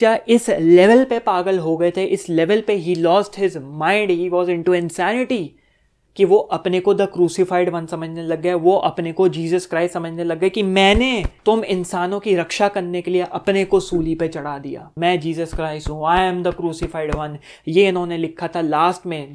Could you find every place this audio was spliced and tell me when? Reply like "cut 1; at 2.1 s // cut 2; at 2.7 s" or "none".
none